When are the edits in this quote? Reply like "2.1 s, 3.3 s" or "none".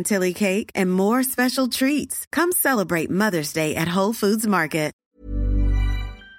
5.0 s